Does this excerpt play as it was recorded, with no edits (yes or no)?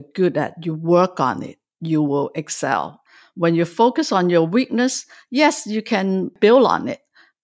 no